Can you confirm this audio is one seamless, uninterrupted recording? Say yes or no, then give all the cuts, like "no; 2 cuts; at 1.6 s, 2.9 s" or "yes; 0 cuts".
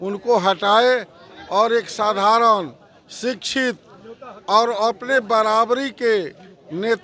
yes; 0 cuts